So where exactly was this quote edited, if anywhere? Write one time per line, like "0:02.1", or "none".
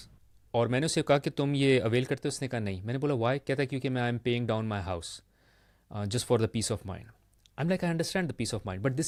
none